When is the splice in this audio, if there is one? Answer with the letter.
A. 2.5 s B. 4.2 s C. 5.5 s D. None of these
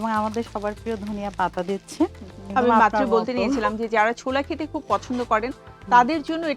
A